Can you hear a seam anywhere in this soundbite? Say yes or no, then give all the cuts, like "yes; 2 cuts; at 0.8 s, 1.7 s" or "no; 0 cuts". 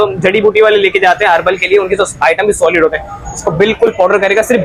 no; 0 cuts